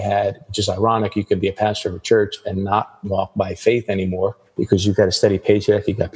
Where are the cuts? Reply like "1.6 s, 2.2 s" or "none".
4.4 s